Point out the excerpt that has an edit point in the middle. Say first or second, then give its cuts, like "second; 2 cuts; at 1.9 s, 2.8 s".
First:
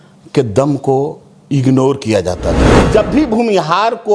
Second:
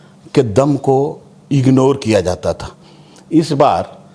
first; 1 cut; at 2.9 s